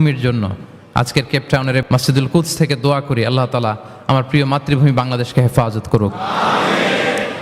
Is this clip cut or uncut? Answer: cut